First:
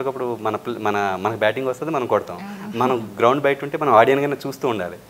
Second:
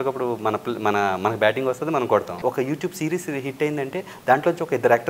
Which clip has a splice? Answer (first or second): second